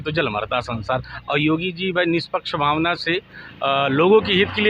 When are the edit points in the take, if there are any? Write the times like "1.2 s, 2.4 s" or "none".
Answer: none